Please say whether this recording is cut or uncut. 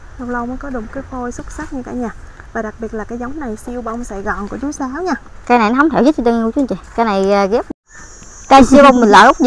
cut